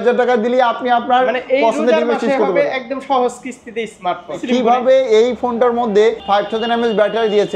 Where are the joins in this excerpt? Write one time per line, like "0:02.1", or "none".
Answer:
0:04.4
0:06.2

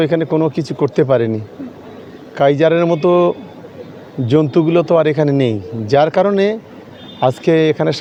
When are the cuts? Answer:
none

